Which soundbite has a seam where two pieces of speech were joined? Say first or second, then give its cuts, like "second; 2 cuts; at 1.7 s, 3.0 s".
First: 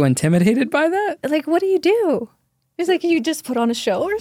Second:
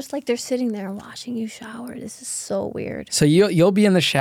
second; 1 cut; at 3.1 s